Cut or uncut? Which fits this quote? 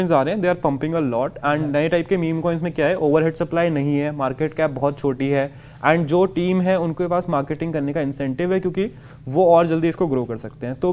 uncut